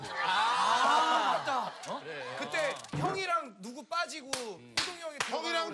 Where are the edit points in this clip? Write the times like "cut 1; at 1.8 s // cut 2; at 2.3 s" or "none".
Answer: none